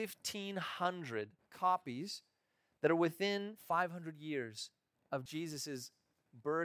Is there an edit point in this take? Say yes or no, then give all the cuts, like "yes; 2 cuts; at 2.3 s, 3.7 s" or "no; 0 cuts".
yes; 3 cuts; at 1.4 s, 3.5 s, 5.3 s